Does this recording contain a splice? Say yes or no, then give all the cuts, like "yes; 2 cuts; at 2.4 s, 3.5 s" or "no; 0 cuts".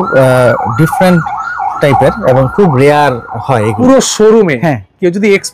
yes; 1 cut; at 3.7 s